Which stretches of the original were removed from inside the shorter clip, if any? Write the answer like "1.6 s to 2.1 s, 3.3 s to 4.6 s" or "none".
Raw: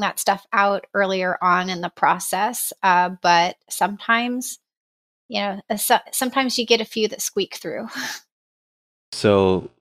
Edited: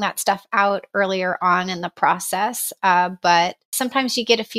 3.7 s to 6.1 s